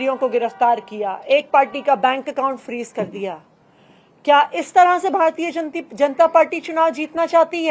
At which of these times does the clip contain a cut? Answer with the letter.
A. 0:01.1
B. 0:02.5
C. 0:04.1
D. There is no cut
D